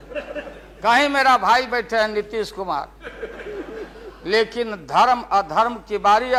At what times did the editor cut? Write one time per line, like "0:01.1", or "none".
none